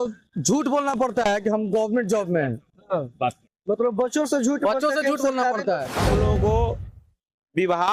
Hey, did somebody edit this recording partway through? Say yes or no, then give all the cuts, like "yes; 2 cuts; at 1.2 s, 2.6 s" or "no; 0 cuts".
yes; 1 cut; at 6.0 s